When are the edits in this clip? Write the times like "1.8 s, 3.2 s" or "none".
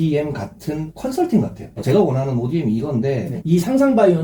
1.8 s, 3.3 s